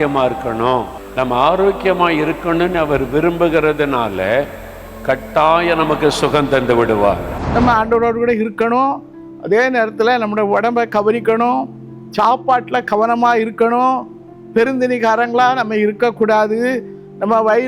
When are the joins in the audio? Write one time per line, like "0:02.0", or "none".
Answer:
0:01.0
0:07.4